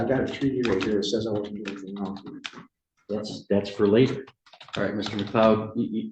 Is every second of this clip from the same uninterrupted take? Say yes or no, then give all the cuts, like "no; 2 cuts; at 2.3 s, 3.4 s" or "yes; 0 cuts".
yes; 0 cuts